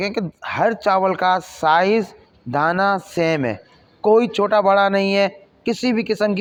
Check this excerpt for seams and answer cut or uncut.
uncut